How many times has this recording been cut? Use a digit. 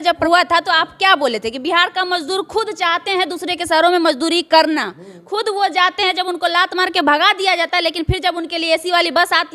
0